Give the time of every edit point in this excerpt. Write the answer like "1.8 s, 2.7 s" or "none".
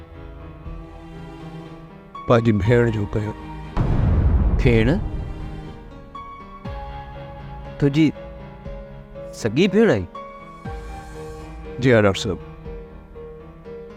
none